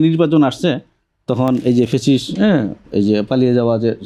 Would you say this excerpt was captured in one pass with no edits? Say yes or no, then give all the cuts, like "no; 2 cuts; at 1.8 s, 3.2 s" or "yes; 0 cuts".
yes; 0 cuts